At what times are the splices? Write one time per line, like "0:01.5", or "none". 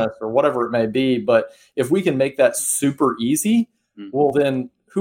none